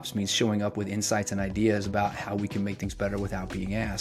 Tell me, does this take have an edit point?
no; 0 cuts

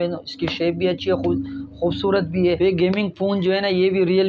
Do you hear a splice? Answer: yes; 1 cut; at 2.6 s

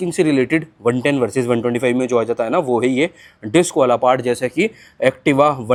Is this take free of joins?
yes; 0 cuts

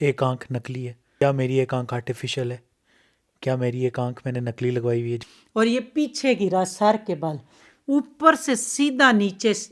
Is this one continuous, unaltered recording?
no; 2 cuts; at 1.0 s, 5.2 s

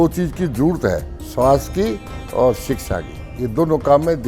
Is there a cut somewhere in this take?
yes; 1 cut; at 1.2 s

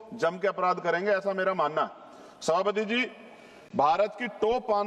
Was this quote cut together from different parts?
no; 0 cuts

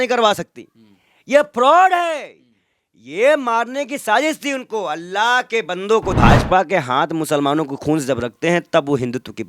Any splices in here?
yes; 1 cut; at 6.2 s

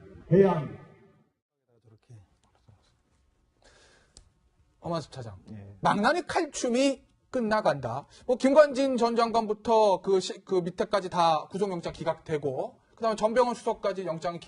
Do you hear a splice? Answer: yes; 1 cut; at 10.7 s

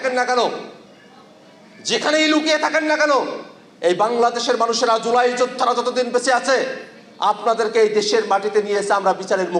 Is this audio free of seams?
yes; 0 cuts

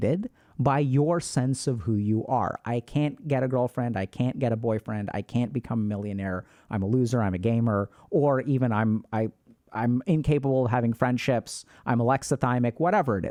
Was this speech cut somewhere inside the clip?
no; 0 cuts

